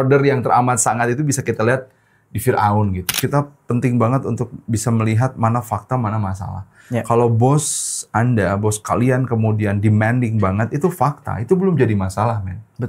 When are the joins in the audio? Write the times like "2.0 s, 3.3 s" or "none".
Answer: 3.1 s

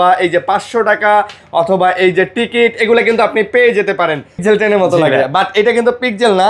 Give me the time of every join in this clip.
4.3 s

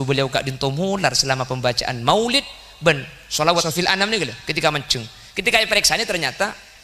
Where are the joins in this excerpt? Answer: 3.6 s

